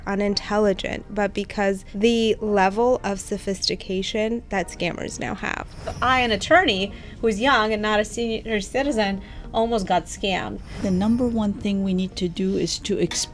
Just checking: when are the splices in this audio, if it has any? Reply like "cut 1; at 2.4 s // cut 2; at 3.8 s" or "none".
cut 1; at 1.9 s // cut 2; at 5.9 s // cut 3; at 8.4 s // cut 4; at 10.8 s